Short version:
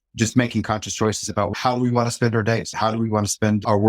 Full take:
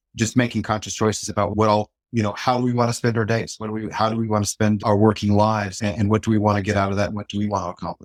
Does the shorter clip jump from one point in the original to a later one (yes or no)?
yes